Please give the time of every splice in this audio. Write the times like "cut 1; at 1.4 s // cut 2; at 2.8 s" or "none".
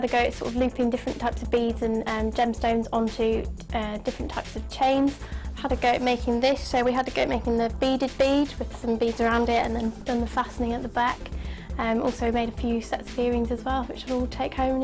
none